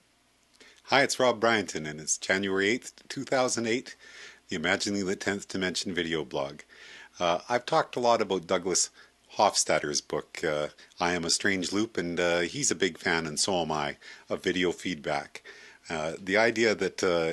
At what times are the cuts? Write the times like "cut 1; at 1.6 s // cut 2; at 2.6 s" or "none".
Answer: cut 1; at 3.2 s